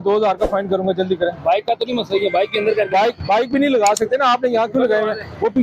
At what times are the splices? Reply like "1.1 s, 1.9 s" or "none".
none